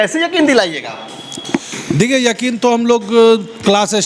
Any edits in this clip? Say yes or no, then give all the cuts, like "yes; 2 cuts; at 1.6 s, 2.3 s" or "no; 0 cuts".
no; 0 cuts